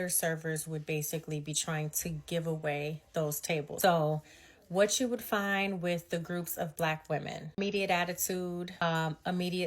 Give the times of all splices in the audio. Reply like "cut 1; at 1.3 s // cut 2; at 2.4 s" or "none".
cut 1; at 3.7 s // cut 2; at 7.6 s // cut 3; at 8.8 s